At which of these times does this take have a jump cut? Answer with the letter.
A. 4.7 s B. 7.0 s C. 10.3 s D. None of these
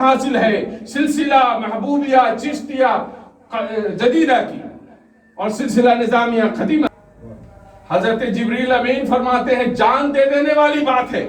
B